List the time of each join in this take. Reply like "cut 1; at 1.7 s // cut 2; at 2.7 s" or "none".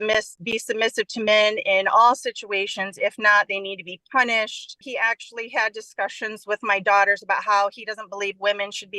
cut 1; at 4.9 s